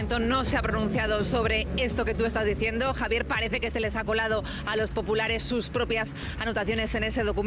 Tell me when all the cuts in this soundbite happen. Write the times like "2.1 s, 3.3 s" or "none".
none